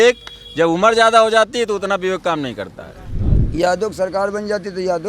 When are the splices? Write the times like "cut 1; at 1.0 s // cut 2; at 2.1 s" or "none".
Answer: cut 1; at 3.2 s